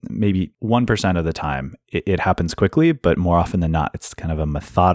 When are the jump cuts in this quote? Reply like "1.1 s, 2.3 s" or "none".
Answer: none

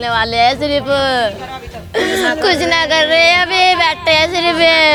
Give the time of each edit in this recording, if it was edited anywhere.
none

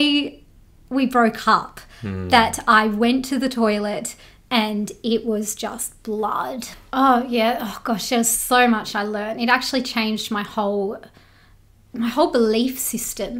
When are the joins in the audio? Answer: 6.7 s

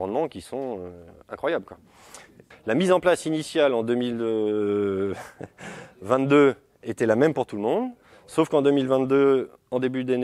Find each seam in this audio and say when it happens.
none

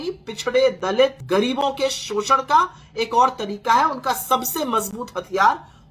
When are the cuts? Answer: 1.2 s

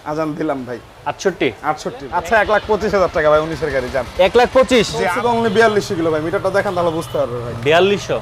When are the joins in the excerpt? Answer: 2.1 s, 5.0 s

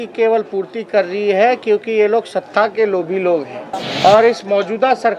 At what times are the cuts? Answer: 3.7 s

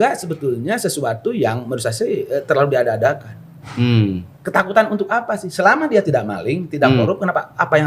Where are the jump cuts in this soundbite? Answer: none

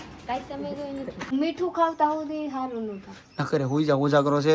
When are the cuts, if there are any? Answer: 1.2 s

